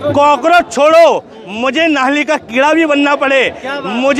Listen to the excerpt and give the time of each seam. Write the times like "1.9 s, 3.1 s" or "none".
none

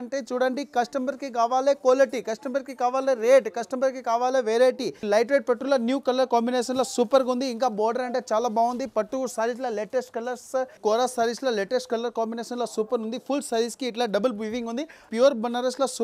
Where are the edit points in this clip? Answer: 5.0 s, 10.8 s, 15.0 s

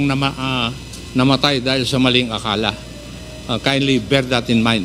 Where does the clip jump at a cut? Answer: none

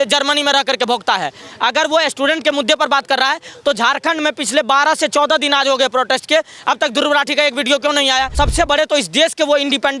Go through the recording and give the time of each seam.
8.3 s

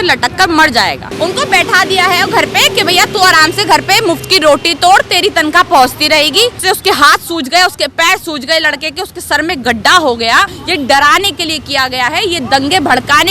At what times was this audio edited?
1.1 s, 6.6 s, 10.6 s

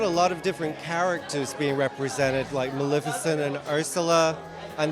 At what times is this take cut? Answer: none

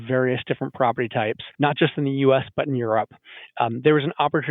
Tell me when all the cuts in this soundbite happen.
1.4 s

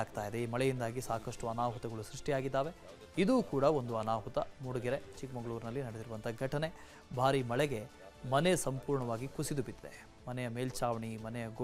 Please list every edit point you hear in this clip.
none

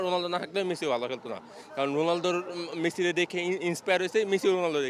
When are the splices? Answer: none

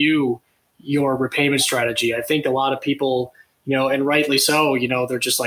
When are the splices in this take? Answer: none

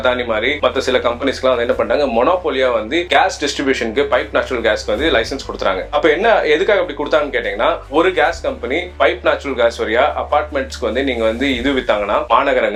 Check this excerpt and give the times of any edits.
none

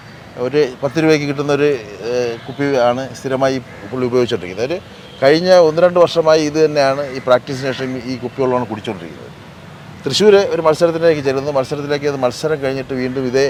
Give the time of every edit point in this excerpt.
none

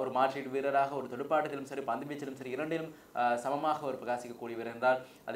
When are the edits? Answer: none

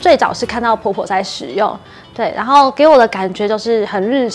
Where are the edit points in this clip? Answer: none

